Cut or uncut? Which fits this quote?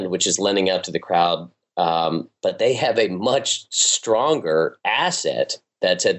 uncut